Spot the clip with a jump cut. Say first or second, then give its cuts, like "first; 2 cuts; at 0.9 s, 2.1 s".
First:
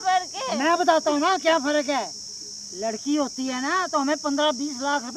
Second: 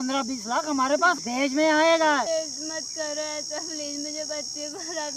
second; 2 cuts; at 1.2 s, 2.3 s